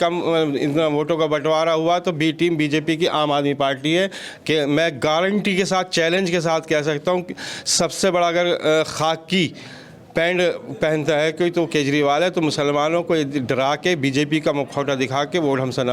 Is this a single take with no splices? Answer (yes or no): yes